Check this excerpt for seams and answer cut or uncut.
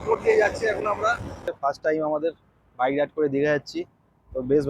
cut